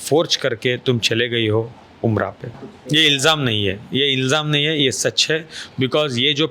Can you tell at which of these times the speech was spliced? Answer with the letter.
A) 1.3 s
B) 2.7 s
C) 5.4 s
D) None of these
B